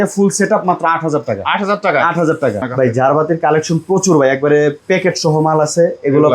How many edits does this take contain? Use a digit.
1